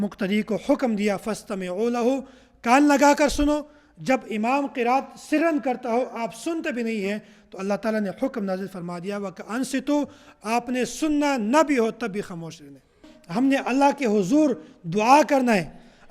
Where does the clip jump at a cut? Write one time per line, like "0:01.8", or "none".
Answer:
0:13.1